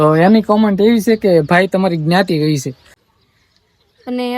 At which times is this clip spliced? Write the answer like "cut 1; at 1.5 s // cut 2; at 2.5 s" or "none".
cut 1; at 3.1 s